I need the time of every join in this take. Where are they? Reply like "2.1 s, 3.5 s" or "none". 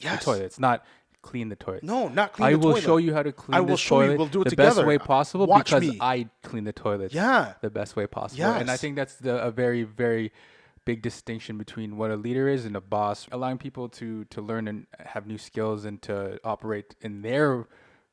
13.3 s